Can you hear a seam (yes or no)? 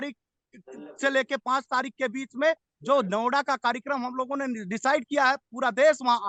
no